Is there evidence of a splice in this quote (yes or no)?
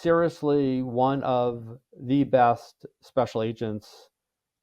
no